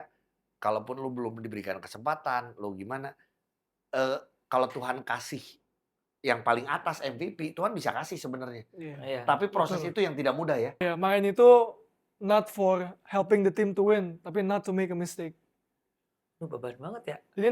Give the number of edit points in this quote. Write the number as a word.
one